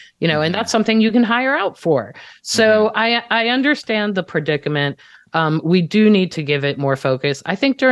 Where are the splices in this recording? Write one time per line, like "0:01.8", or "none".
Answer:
none

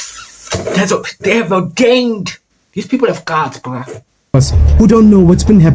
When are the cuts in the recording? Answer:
0:04.3

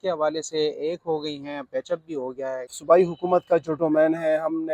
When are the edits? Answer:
0:02.7

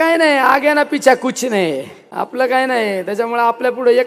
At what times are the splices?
0:02.0

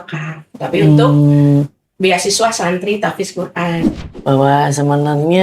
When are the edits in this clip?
0:03.9

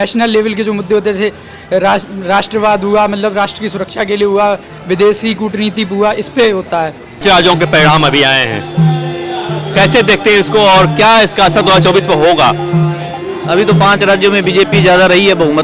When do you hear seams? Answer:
0:07.1

